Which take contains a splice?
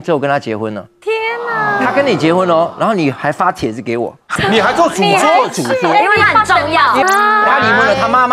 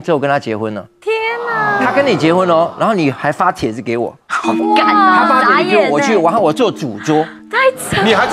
first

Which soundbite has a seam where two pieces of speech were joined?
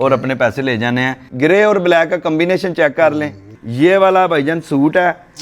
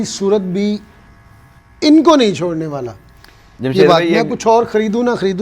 first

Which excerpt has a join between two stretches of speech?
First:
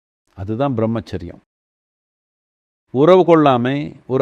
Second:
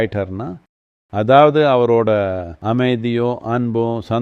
second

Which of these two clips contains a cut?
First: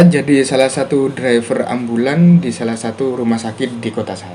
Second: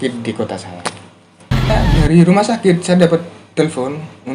second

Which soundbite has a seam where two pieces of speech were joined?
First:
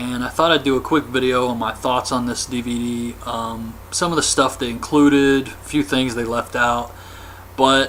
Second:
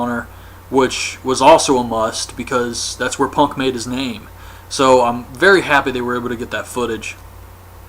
second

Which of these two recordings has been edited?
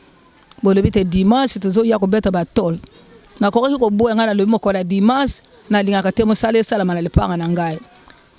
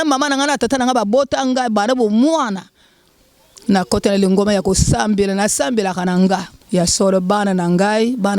second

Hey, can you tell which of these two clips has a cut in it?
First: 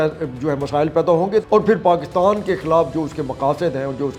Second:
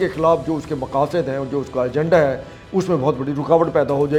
first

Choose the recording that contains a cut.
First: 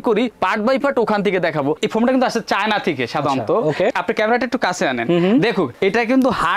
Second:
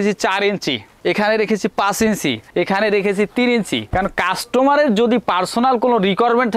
first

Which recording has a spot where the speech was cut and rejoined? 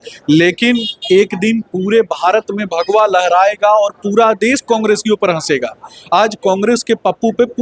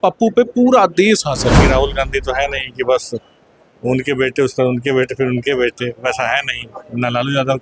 second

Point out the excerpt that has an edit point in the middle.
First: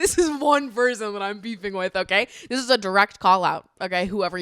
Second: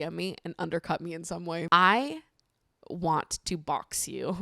second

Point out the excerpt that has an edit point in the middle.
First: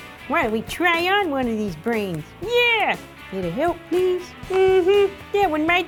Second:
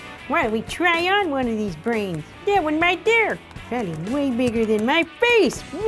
second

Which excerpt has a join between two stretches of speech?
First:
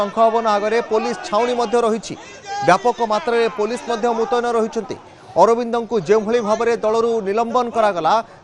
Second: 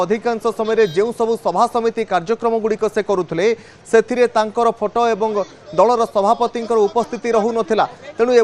second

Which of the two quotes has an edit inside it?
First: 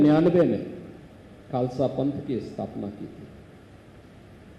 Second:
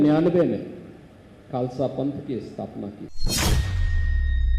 second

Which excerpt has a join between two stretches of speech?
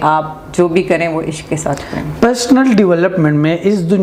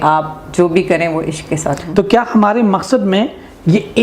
second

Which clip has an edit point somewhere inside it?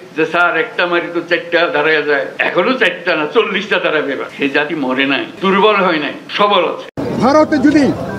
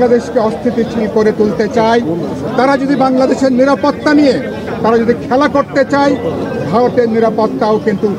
first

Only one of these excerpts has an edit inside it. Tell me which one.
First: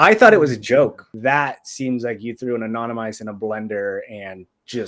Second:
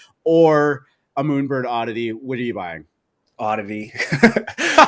first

